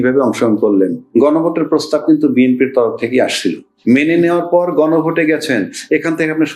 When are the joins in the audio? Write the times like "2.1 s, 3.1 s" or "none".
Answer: 1.0 s, 3.7 s